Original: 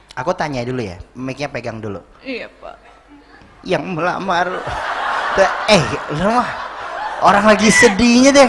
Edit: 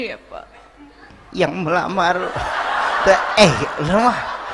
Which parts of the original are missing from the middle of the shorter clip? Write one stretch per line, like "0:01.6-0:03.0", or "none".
none